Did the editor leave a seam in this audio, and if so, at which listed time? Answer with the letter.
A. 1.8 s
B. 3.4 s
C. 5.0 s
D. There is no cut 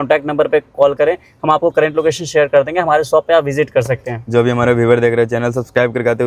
D